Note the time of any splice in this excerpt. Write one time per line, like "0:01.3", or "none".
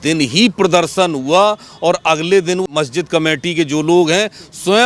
0:02.7